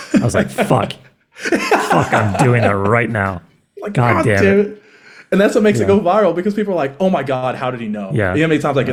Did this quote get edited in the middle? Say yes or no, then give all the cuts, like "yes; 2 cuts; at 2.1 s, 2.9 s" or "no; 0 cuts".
no; 0 cuts